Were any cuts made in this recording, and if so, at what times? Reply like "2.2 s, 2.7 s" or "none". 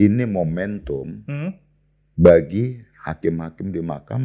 none